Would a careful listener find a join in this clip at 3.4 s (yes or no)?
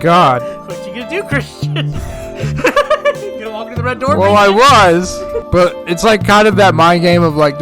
no